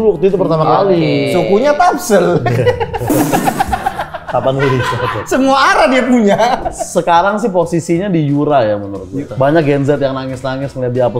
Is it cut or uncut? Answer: cut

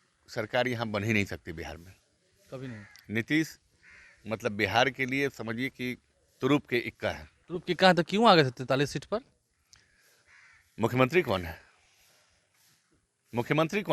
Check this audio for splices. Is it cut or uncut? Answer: uncut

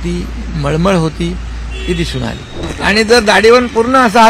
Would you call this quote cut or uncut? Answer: cut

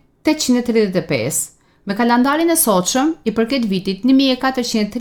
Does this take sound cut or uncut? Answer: uncut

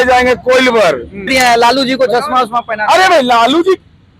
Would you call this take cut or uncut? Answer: cut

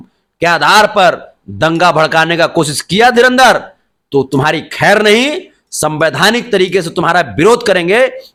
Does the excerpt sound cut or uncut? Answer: uncut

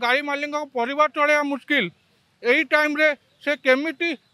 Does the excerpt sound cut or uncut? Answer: uncut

